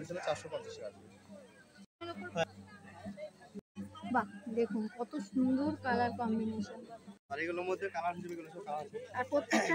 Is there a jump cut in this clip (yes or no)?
yes